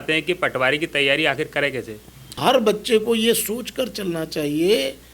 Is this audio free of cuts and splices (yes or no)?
no